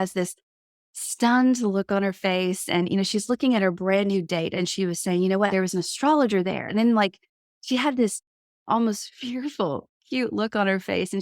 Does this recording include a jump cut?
yes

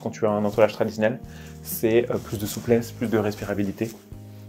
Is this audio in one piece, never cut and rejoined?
yes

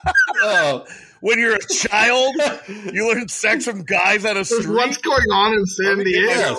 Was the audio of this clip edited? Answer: no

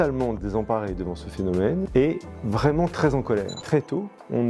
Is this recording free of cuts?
no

